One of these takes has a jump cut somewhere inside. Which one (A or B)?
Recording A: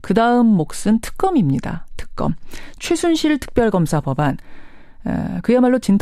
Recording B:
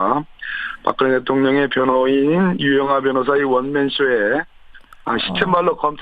A